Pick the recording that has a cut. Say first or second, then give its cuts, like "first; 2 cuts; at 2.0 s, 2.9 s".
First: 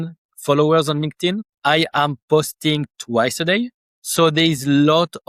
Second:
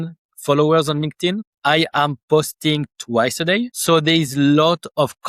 second; 1 cut; at 3.8 s